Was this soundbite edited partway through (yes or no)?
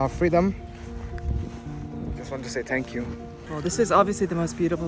yes